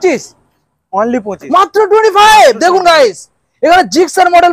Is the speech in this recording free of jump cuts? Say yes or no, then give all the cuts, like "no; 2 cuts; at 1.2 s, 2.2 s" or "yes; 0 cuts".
yes; 0 cuts